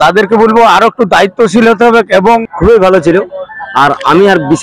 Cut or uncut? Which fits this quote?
cut